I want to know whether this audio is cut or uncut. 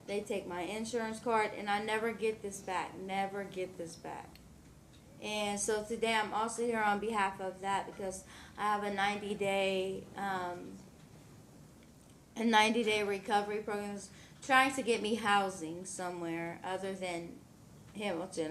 uncut